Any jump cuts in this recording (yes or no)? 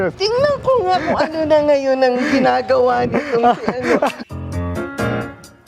yes